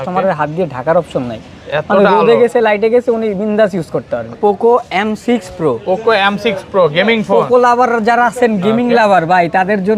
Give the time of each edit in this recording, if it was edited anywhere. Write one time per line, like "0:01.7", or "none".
0:04.4